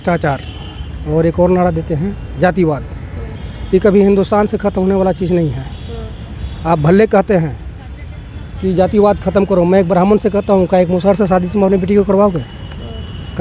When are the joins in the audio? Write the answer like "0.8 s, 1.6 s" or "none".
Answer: none